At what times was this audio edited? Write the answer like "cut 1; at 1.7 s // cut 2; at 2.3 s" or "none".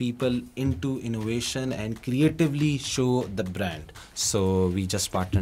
cut 1; at 4.0 s